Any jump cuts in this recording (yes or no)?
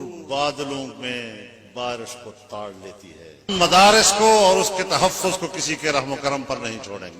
yes